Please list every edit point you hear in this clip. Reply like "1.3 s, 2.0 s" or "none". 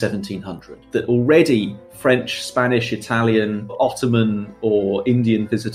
3.7 s